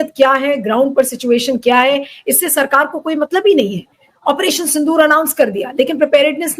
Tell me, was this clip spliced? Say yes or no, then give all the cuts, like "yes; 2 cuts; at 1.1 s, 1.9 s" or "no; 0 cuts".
no; 0 cuts